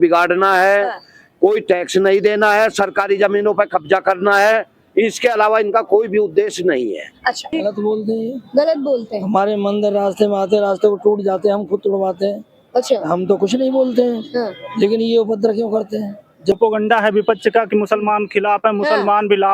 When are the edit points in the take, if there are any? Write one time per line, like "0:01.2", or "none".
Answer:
0:07.5
0:16.5

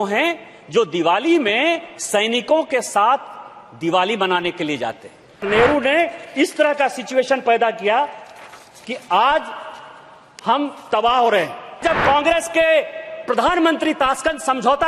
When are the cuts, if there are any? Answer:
0:05.4
0:11.8

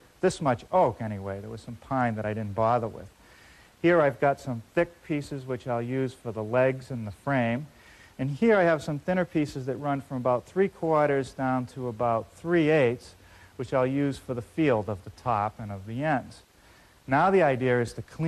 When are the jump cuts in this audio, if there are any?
none

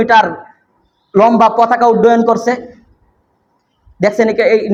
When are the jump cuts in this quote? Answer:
none

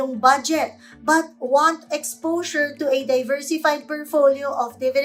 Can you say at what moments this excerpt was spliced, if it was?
none

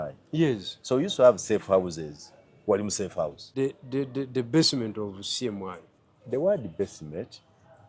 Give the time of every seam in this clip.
0:03.5

